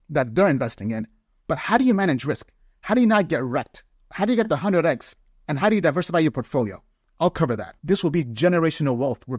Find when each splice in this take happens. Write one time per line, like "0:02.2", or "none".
0:07.7